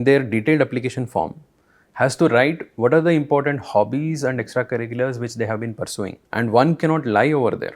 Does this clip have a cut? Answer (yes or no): yes